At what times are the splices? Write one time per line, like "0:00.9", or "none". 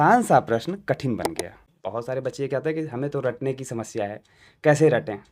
0:01.7